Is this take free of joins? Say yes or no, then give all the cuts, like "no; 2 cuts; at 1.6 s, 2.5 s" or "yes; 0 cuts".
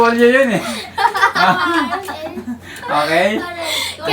yes; 0 cuts